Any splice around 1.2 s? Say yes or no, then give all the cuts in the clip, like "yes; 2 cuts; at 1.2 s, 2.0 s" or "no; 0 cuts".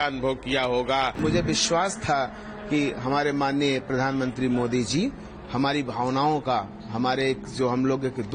yes; 1 cut; at 1.2 s